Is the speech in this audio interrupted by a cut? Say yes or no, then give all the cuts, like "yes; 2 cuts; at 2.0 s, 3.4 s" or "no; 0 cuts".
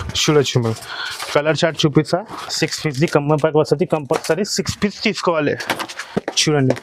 yes; 1 cut; at 2.4 s